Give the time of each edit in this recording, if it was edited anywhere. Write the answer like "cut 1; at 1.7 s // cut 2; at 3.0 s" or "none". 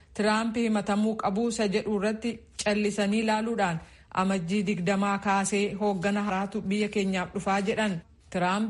cut 1; at 6.3 s